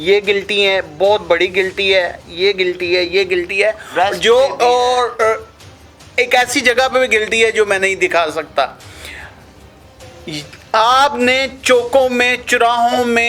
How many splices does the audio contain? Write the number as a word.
zero